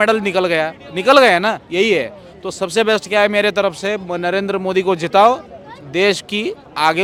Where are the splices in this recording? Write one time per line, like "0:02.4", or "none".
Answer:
none